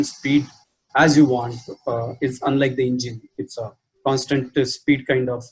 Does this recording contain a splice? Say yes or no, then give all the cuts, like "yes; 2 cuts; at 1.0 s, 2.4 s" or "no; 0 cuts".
no; 0 cuts